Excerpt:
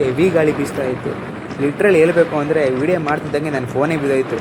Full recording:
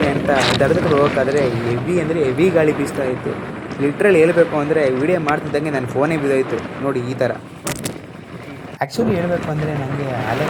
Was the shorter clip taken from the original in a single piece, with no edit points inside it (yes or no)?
yes